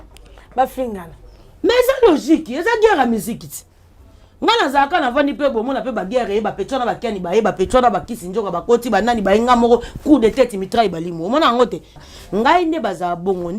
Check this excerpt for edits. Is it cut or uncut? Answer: cut